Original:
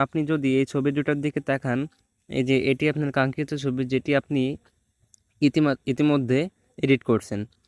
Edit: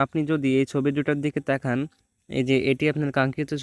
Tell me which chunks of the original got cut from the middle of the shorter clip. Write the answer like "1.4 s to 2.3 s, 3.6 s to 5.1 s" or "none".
none